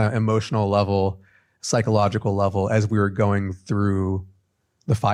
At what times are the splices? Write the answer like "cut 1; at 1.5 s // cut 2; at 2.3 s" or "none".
none